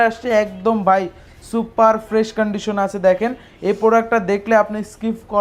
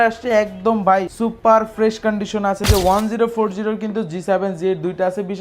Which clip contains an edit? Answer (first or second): second